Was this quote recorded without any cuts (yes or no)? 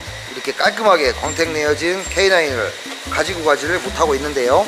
no